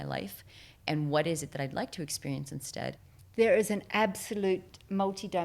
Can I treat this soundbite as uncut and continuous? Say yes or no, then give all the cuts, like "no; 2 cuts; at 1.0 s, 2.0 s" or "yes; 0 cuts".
no; 1 cut; at 3.1 s